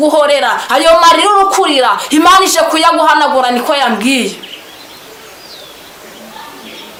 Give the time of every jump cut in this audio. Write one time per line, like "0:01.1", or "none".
none